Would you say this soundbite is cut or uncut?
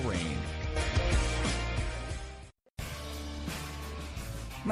uncut